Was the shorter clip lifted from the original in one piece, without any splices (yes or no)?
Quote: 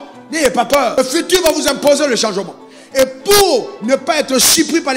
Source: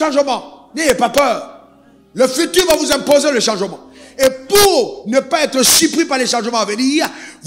no